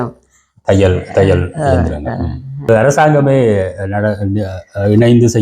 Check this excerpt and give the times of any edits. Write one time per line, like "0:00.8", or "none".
0:02.7